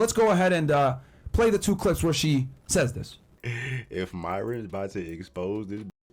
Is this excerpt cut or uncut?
cut